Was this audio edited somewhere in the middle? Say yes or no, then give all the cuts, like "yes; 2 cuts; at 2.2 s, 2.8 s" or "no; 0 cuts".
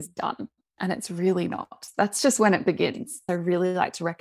yes; 2 cuts; at 1.9 s, 3.2 s